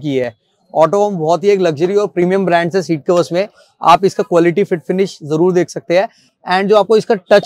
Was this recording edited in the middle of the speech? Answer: no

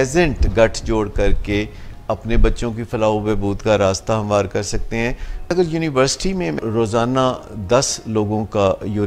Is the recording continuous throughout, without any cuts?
no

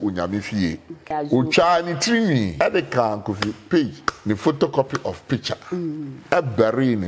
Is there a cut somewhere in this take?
yes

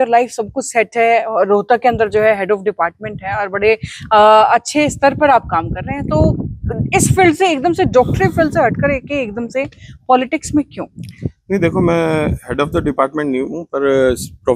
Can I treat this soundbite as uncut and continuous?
yes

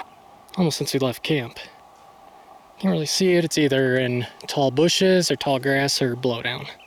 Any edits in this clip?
no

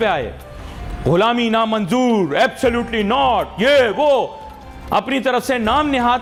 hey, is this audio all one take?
yes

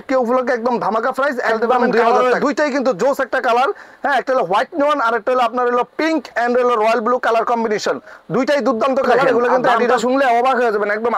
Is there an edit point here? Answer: yes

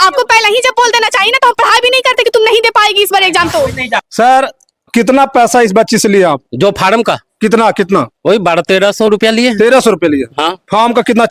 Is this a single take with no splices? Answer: no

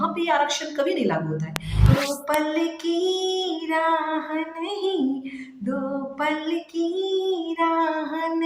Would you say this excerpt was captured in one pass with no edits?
no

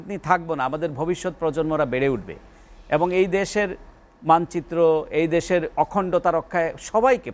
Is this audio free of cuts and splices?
yes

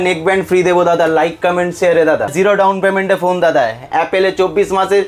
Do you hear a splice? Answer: yes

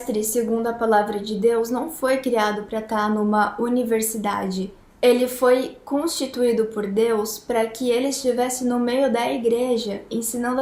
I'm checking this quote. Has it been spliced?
no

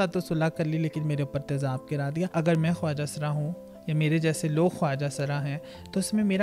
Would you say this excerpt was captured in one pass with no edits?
no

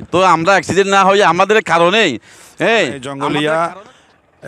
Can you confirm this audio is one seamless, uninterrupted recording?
no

